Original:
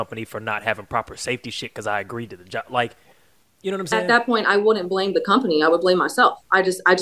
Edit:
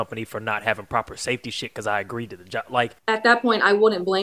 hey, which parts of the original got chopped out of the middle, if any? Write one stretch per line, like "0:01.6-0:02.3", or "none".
0:03.0-0:03.8